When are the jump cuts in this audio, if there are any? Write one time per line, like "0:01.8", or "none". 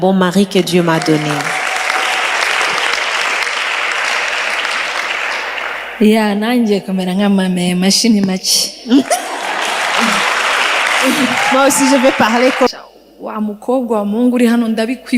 0:12.7